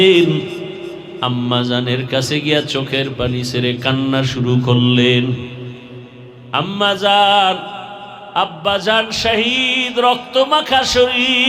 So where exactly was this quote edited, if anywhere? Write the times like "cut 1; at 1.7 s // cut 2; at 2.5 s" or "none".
none